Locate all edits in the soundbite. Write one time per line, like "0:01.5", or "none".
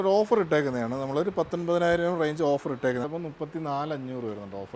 0:03.1